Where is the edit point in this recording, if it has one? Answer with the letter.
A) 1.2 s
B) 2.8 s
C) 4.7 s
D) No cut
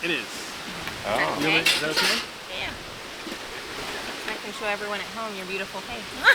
D